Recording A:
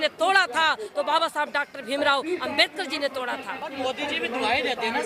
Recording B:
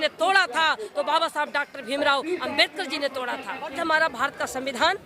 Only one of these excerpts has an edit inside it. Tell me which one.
B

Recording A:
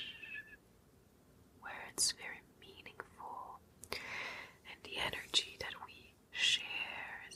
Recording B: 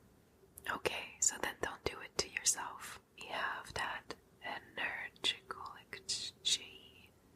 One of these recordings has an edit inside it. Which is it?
B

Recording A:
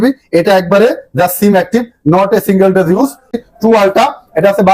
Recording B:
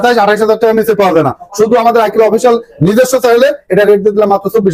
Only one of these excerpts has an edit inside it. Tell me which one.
A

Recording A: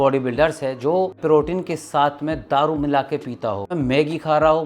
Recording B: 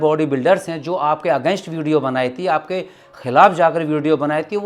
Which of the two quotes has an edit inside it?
A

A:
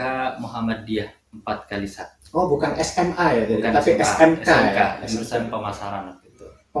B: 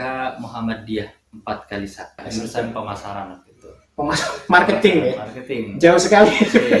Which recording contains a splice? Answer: B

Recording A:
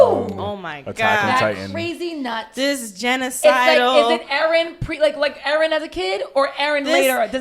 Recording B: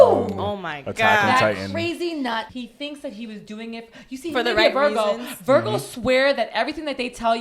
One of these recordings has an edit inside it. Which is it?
B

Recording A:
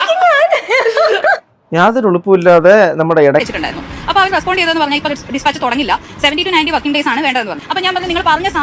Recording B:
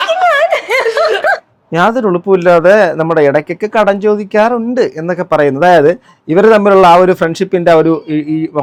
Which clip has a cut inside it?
A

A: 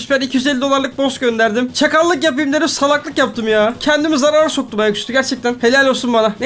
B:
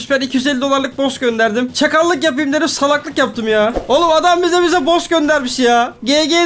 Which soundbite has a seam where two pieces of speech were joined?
B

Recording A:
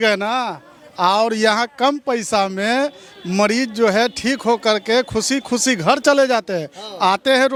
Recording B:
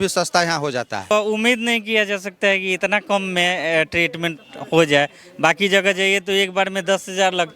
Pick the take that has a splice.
B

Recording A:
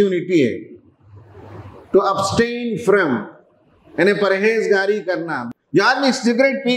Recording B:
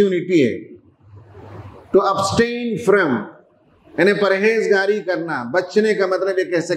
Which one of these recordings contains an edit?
A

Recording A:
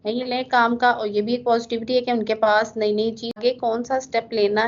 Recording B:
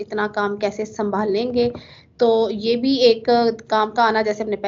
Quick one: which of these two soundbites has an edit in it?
A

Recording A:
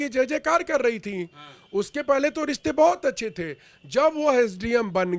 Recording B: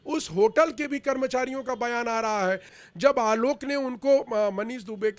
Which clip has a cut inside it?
B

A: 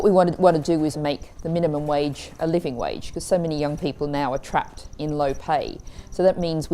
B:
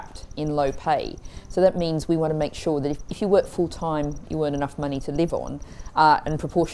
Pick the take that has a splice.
A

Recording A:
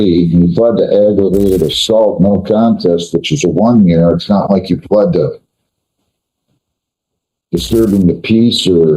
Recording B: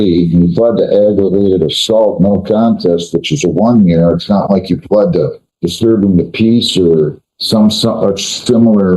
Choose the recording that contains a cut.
B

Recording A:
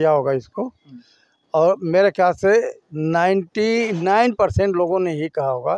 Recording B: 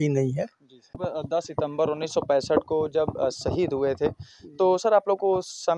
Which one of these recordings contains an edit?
B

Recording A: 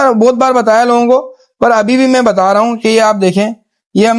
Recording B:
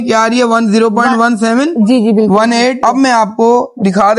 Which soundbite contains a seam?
B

